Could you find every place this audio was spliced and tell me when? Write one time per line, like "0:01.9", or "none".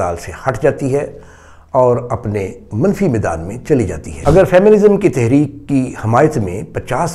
0:04.0